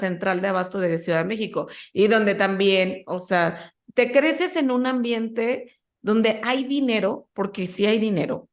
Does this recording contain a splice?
no; 0 cuts

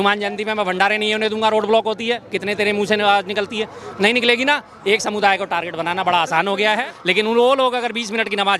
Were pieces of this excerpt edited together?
yes; 1 cut; at 6.7 s

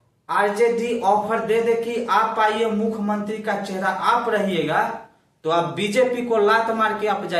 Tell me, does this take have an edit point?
no; 0 cuts

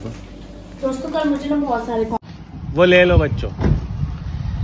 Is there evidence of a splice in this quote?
yes; 1 cut; at 2.3 s

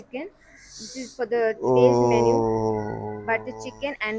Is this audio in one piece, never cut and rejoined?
yes; 0 cuts

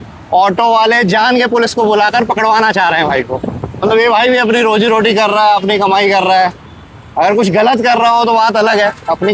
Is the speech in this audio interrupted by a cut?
no; 0 cuts

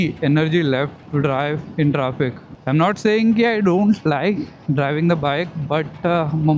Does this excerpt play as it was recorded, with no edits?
no; 2 cuts; at 1.0 s, 2.5 s

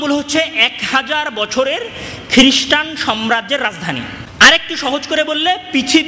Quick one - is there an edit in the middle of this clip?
yes; 1 cut; at 4.2 s

